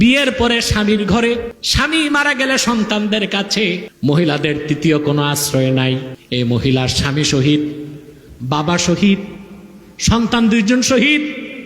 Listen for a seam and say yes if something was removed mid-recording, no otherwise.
yes